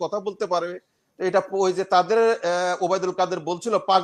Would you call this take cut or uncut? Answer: uncut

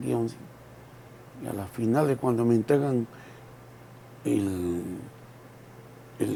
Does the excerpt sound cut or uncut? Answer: uncut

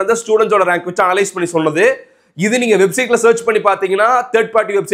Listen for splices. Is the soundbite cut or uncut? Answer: uncut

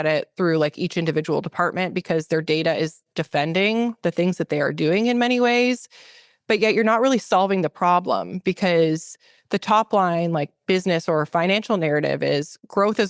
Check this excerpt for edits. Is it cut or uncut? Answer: uncut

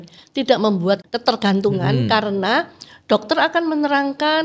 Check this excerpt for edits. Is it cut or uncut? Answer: cut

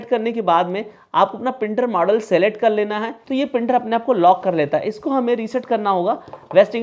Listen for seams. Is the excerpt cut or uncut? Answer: cut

